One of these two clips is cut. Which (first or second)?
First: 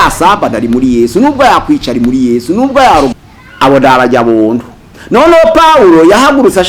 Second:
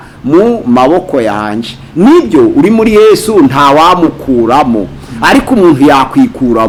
first